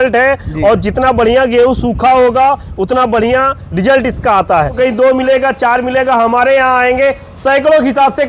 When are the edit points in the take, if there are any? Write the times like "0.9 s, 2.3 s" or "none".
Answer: 4.7 s